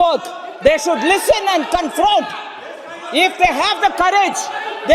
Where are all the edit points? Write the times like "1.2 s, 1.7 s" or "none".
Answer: none